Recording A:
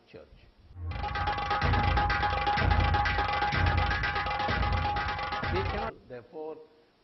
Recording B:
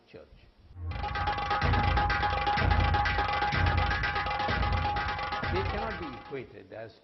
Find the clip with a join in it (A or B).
B